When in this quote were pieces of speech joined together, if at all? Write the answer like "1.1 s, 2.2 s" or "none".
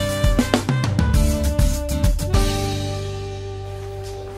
none